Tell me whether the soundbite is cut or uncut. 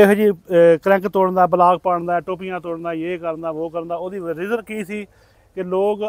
uncut